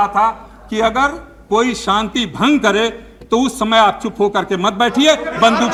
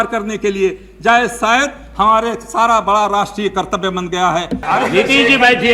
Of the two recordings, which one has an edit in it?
second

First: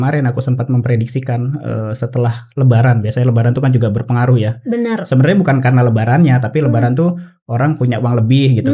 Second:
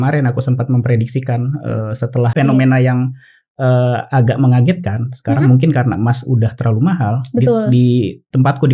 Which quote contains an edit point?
second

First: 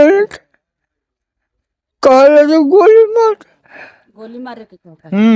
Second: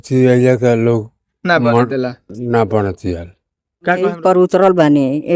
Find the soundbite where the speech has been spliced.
second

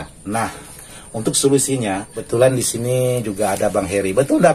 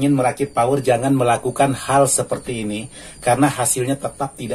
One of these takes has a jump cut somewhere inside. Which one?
first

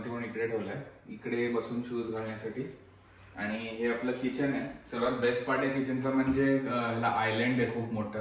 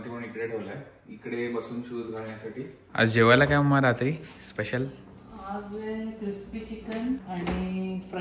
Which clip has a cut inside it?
second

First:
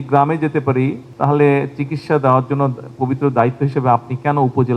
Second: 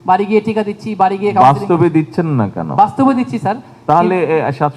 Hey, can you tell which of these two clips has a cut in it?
first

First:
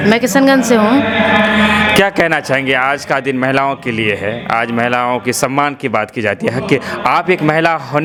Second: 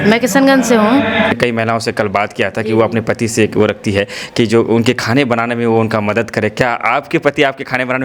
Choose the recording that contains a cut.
second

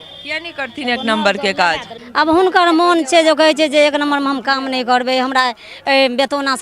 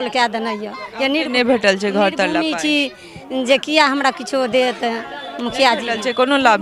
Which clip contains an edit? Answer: first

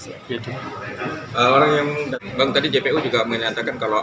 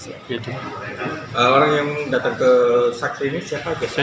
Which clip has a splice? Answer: first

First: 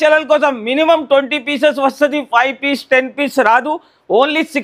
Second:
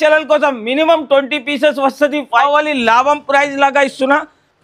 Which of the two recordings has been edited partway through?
second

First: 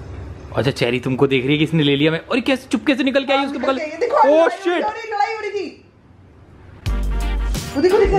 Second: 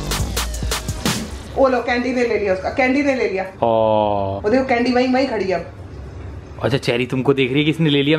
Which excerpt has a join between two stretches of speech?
second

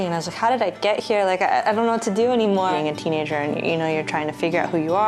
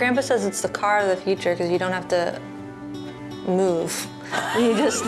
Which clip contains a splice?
first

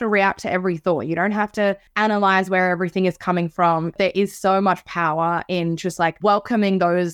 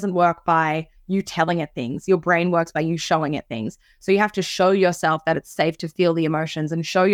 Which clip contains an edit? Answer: first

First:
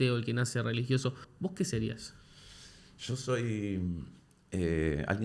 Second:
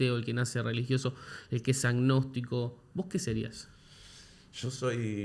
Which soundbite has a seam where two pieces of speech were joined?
first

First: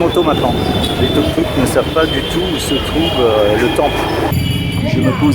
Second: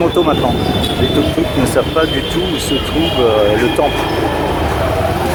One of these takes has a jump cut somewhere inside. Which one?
first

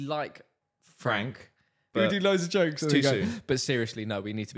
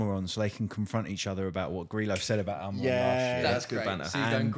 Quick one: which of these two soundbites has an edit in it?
first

